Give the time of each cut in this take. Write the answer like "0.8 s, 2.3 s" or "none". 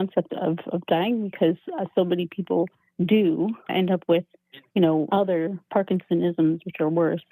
2.8 s, 3.7 s